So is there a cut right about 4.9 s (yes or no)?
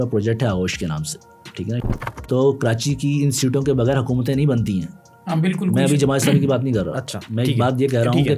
no